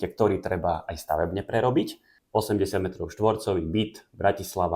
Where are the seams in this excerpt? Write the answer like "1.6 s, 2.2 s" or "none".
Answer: 2.1 s